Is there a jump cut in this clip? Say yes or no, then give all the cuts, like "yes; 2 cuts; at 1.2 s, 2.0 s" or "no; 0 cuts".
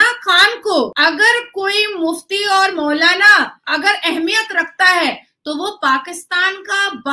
yes; 1 cut; at 0.9 s